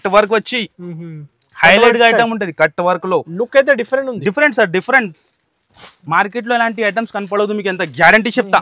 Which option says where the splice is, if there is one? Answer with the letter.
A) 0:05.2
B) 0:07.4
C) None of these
C